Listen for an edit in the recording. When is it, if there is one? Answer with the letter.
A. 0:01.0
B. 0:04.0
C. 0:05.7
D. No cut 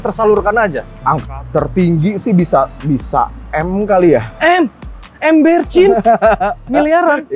A